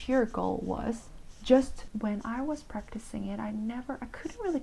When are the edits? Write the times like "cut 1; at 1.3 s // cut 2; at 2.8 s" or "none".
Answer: cut 1; at 1.8 s